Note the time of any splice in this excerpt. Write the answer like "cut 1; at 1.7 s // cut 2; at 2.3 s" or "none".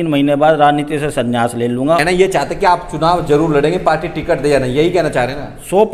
cut 1; at 2.0 s